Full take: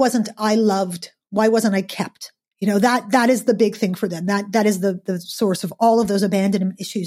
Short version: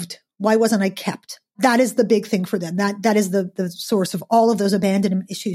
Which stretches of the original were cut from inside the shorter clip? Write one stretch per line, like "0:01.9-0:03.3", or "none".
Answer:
0:02.5-0:03.0